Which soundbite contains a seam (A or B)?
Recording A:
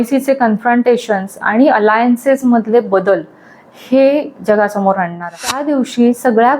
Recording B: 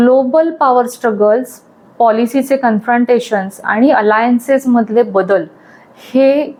A